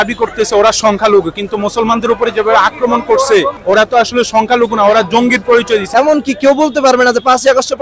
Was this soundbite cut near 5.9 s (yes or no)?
yes